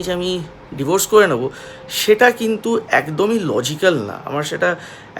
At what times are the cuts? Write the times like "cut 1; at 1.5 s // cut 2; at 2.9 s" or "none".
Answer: none